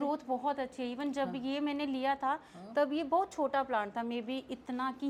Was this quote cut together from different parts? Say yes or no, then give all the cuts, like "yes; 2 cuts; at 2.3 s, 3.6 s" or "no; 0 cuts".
no; 0 cuts